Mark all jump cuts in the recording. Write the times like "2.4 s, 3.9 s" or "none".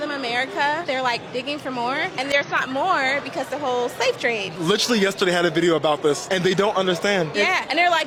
none